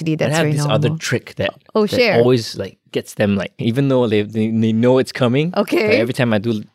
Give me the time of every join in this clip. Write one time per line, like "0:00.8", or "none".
0:03.5